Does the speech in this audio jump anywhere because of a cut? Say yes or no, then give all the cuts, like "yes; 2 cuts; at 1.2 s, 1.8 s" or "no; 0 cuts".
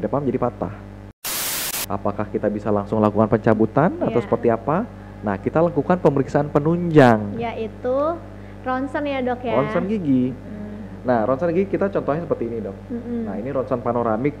yes; 1 cut; at 1.5 s